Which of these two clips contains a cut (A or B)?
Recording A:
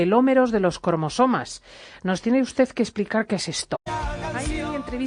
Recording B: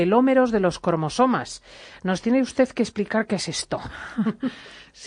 B